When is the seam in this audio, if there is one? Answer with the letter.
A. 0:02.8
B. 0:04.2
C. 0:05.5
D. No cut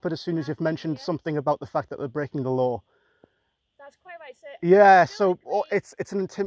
D